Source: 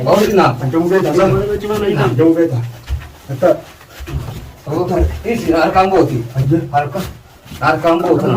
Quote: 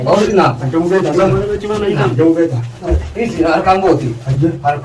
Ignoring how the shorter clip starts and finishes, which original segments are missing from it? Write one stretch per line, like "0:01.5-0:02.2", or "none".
0:02.8-0:04.9